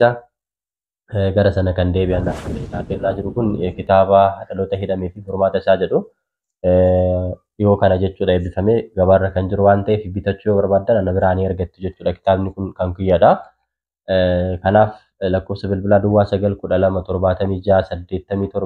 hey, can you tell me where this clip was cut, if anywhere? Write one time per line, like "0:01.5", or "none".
0:02.4